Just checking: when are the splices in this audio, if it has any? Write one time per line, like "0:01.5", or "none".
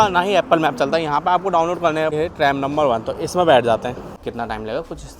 0:02.1
0:04.1